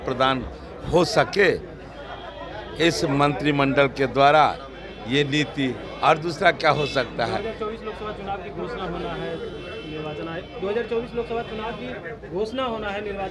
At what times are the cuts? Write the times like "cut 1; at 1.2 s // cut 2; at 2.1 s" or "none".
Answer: none